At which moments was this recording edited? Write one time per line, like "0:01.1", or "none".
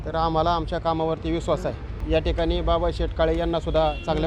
0:01.9